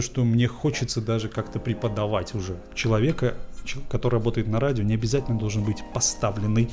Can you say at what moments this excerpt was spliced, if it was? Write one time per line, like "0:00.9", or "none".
0:02.6

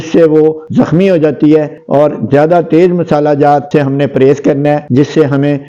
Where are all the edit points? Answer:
0:01.7

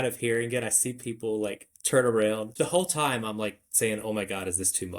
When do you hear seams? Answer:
0:02.5

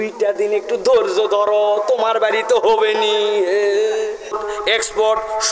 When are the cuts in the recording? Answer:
0:04.4

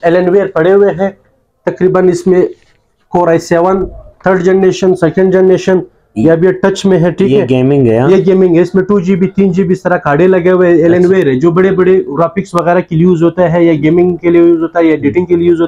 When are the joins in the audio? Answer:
none

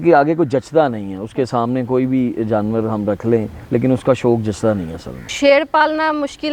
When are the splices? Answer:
0:03.6
0:05.1

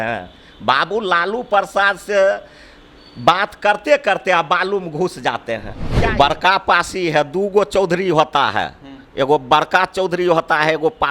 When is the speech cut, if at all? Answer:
0:05.8

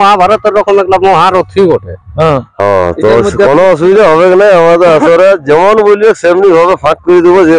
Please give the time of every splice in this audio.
0:02.5

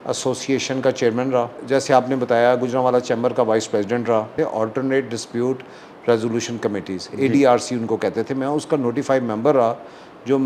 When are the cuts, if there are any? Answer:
0:01.6
0:04.3

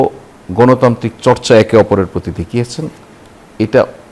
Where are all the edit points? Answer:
none

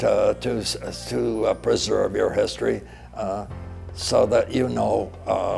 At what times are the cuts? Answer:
none

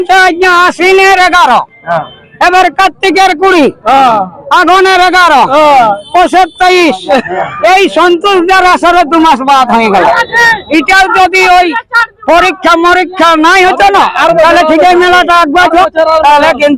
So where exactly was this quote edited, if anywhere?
none

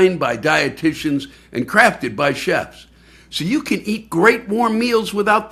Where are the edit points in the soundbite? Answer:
none

